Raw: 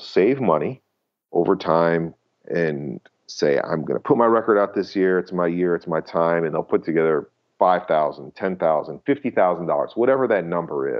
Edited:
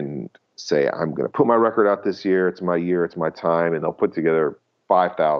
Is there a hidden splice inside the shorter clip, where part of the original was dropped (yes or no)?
no